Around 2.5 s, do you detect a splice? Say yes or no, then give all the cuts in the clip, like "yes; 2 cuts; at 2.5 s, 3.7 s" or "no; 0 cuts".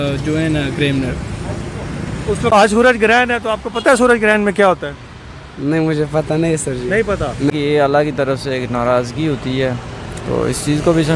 yes; 2 cuts; at 2.5 s, 7.5 s